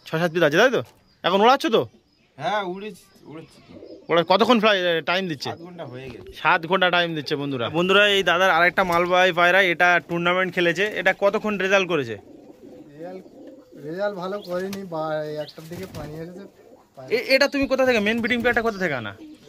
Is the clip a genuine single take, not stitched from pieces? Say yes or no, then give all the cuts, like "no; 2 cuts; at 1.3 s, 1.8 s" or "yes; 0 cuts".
no; 2 cuts; at 7.7 s, 17.0 s